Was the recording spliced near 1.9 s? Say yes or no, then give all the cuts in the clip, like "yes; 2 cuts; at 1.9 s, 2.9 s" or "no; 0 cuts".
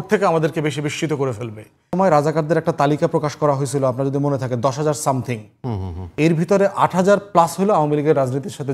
yes; 1 cut; at 1.9 s